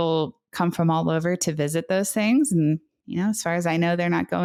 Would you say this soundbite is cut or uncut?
uncut